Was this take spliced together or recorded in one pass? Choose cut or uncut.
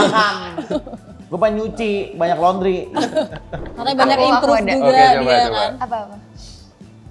cut